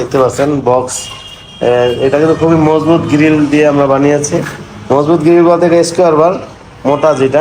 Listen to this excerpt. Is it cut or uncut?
uncut